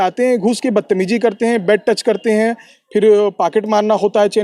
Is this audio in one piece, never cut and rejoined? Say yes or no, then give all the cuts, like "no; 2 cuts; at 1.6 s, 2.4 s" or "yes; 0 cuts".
yes; 0 cuts